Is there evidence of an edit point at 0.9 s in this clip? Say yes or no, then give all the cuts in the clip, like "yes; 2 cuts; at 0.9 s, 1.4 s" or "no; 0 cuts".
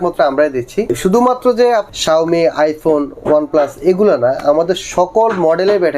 yes; 2 cuts; at 0.9 s, 1.9 s